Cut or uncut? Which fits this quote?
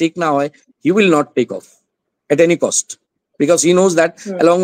uncut